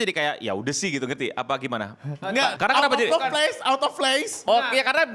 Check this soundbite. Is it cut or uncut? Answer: uncut